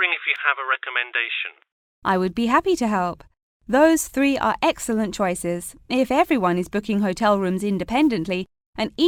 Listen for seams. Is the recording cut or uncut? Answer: uncut